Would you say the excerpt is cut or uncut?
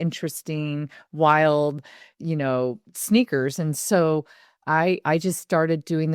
uncut